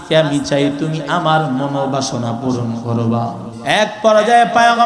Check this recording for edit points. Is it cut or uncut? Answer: cut